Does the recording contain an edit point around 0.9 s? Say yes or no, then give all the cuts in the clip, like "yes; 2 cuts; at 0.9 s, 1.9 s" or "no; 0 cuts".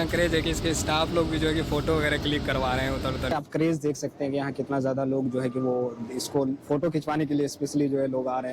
no; 1 cut; at 3.3 s